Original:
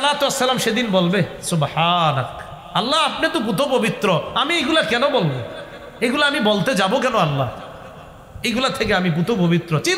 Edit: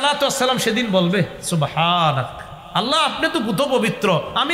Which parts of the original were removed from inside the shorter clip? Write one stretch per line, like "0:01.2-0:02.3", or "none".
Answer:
none